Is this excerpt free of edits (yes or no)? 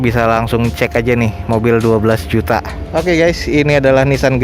yes